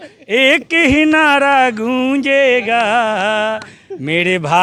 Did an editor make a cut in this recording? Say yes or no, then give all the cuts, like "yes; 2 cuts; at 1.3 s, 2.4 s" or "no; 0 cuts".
no; 0 cuts